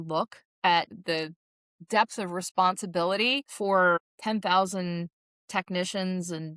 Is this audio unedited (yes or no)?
no